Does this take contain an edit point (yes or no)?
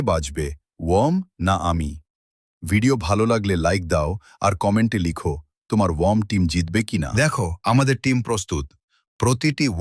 yes